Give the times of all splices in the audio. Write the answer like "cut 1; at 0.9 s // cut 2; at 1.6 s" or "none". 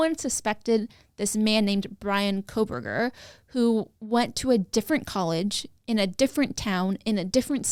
none